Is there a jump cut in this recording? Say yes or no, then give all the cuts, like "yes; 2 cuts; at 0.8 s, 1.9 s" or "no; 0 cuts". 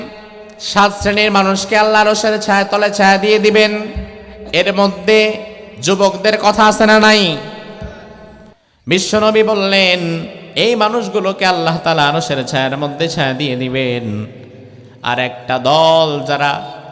no; 0 cuts